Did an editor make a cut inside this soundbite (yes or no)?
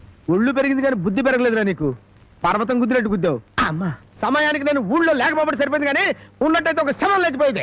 yes